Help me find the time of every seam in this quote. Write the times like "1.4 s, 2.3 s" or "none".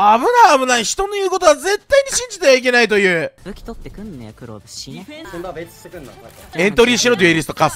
3.4 s, 5.2 s, 6.4 s